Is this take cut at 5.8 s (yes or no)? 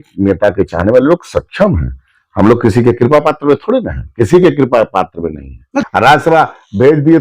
yes